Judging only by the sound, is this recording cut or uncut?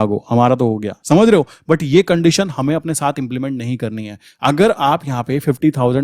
uncut